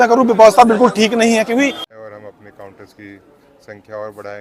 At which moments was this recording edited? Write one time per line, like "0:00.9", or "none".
0:01.8